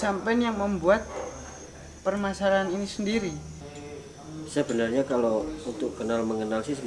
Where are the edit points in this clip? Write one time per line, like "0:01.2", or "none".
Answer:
0:03.5